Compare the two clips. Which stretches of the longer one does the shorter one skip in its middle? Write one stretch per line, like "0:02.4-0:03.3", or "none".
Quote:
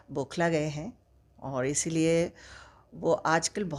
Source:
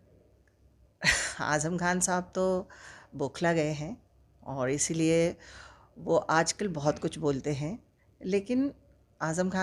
none